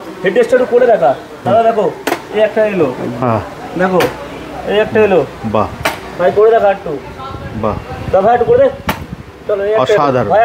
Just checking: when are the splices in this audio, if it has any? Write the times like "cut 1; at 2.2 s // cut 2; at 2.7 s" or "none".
none